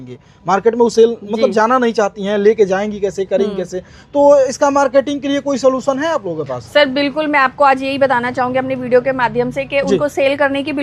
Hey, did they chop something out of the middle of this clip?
no; 0 cuts

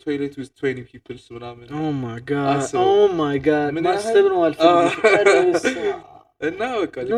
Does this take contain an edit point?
no; 0 cuts

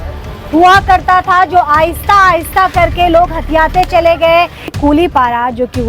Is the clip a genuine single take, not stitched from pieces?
no; 1 cut; at 4.7 s

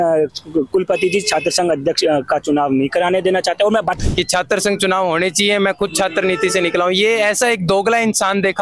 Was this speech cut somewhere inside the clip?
yes; 1 cut; at 4.0 s

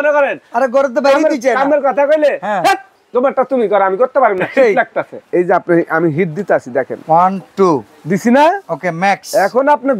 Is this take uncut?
no; 2 cuts; at 2.9 s, 5.2 s

